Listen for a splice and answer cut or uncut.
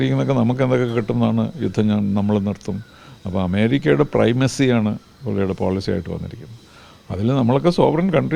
uncut